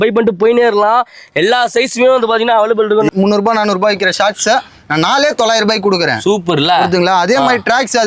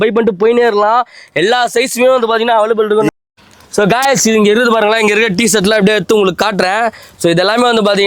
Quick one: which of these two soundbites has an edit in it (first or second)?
first